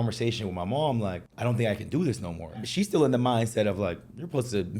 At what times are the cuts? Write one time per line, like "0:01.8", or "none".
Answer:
0:01.3
0:02.6